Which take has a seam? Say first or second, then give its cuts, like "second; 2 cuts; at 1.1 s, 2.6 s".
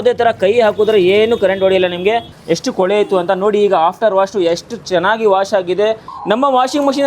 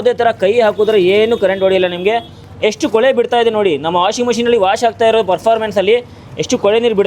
first; 2 cuts; at 2.3 s, 6.1 s